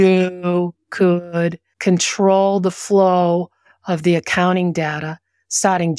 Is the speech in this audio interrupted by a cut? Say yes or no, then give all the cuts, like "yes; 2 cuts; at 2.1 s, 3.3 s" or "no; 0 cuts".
yes; 1 cut; at 1.7 s